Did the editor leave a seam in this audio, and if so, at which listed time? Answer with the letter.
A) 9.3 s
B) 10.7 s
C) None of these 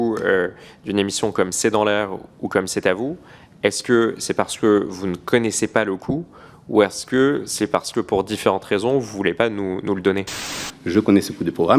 B